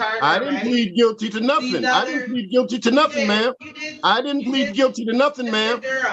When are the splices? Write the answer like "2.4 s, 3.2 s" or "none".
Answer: none